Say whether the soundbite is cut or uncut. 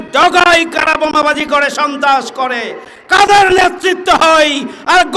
uncut